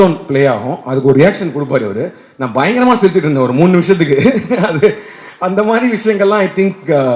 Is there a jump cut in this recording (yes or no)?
no